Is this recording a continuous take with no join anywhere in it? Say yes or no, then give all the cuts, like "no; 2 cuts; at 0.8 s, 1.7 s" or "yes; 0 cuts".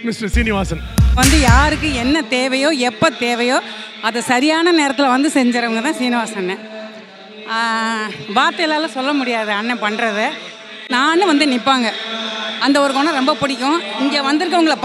no; 1 cut; at 1.1 s